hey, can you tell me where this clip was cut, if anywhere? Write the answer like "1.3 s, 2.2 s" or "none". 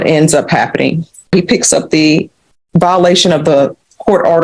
1.3 s